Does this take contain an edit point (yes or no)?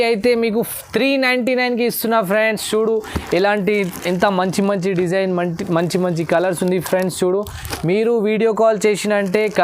no